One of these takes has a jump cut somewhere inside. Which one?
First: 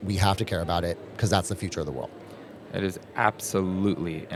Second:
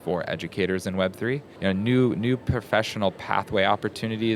second; 1 cut; at 1.5 s

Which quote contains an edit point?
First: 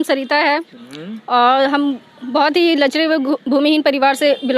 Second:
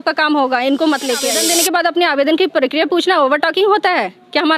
second; 1 cut; at 1.4 s

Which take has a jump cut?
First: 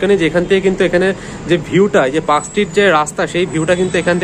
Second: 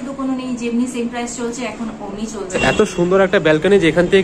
second; 1 cut; at 2.6 s

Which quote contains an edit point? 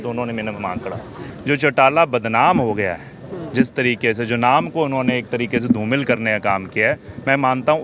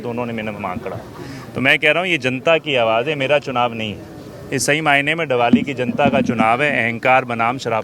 first; 1 cut; at 1.3 s

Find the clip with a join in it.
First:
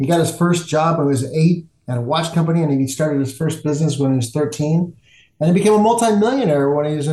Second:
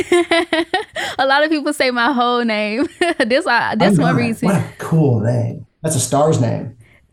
second; 1 cut; at 5.5 s

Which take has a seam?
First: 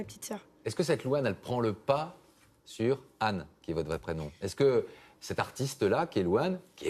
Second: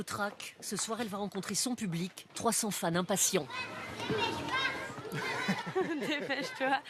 first; 1 cut; at 5.1 s

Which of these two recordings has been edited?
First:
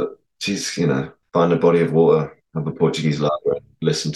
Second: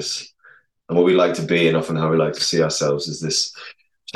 first; 2 cuts; at 1.2 s, 2.4 s

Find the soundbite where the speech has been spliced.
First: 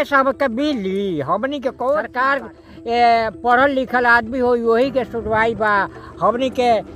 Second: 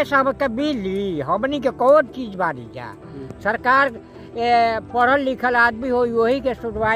first; 1 cut; at 2.1 s

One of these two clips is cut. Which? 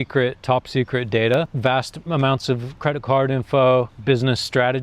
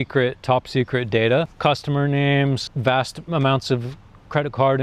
first; 2 cuts; at 1.5 s, 2.7 s

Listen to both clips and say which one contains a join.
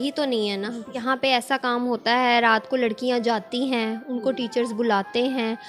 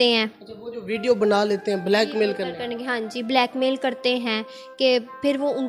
first; 1 cut; at 1.0 s

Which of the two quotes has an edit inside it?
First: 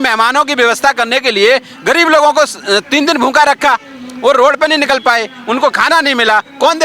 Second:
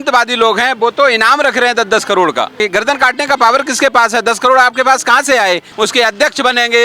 second; 2 cuts; at 2.6 s, 5.7 s

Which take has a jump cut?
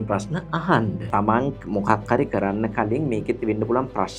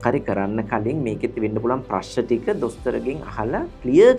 first; 1 cut; at 1.0 s

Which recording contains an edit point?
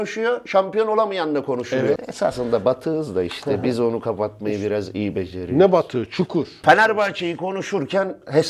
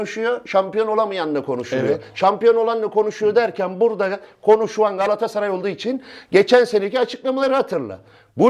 first; 2 cuts; at 2.1 s, 6.5 s

